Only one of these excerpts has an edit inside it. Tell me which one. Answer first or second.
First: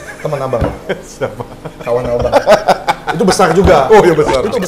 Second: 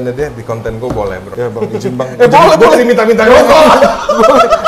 second